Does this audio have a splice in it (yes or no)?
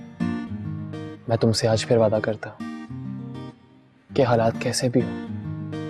no